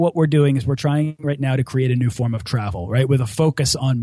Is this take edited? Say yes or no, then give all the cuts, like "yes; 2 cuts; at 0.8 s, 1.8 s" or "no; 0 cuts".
yes; 1 cut; at 1.2 s